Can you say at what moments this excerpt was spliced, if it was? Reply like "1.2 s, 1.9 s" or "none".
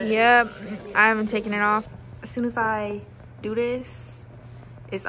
1.9 s